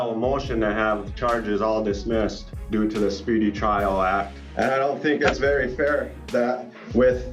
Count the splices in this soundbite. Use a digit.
2